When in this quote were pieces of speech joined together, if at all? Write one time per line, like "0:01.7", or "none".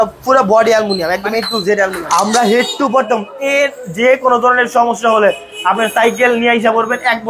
0:02.0